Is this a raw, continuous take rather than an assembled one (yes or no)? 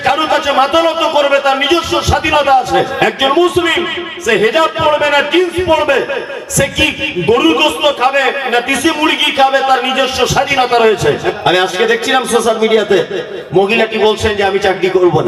no